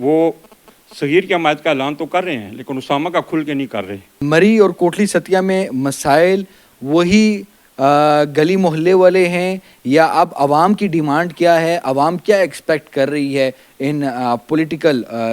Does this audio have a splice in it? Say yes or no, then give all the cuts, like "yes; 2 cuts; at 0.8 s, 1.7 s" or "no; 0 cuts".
no; 0 cuts